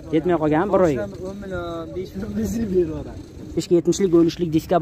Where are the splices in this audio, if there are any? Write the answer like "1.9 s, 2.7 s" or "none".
3.6 s